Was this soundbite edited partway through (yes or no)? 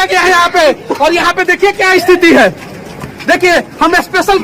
no